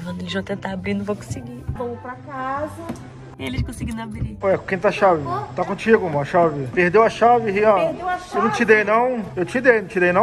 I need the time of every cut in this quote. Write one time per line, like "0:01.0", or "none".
0:06.6
0:09.3